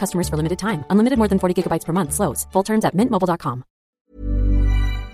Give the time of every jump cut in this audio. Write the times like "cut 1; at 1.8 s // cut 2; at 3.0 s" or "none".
cut 1; at 4.1 s